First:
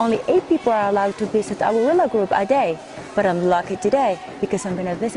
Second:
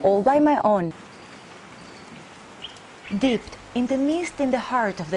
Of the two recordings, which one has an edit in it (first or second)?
first